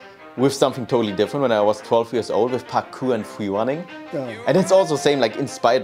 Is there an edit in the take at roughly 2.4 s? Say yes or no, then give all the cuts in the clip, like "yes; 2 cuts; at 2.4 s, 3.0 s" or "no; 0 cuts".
no; 1 cut; at 4.0 s